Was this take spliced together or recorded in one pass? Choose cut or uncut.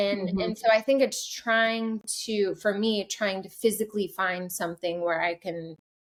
uncut